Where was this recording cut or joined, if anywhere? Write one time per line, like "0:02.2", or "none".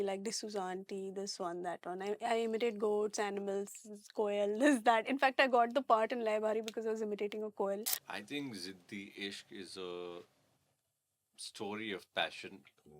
0:08.0